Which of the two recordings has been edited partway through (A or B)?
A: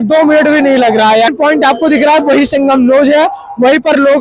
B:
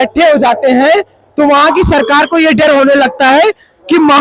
A